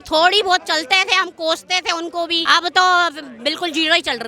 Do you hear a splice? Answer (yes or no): yes